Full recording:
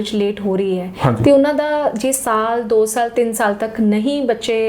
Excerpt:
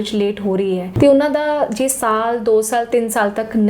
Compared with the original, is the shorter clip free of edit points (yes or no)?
no